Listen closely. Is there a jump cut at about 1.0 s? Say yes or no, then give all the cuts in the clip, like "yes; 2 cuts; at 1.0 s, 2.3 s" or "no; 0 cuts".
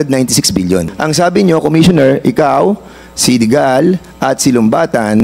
yes; 1 cut; at 1.0 s